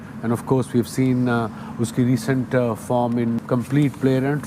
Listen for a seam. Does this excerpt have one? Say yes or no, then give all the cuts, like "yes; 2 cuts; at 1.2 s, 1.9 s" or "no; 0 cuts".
yes; 1 cut; at 3.4 s